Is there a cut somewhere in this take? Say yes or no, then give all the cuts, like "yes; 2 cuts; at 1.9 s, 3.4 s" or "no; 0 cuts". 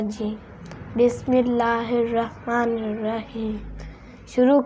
no; 0 cuts